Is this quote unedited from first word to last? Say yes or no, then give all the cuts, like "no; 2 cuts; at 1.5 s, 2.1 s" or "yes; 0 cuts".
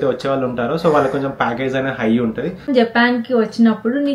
no; 1 cut; at 2.7 s